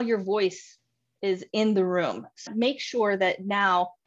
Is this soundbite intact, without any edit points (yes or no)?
no